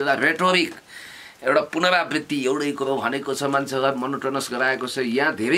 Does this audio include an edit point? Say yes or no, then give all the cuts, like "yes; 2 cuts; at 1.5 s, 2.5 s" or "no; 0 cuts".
no; 0 cuts